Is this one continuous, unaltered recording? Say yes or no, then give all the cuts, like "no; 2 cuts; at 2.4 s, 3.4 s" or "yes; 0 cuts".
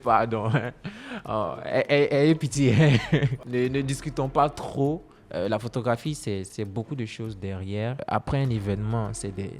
no; 2 cuts; at 3.3 s, 8.0 s